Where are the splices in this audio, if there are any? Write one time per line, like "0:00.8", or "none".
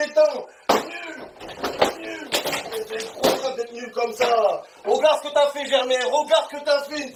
none